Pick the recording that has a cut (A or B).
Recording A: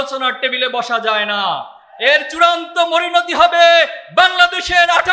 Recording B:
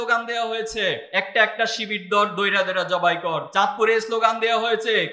B